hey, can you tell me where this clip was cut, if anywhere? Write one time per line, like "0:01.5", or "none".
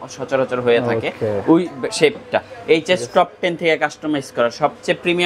none